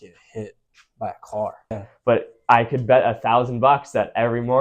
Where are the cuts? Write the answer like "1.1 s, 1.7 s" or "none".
1.9 s